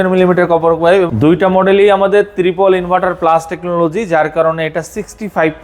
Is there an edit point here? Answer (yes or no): yes